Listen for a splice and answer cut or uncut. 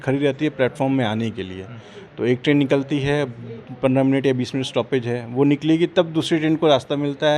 uncut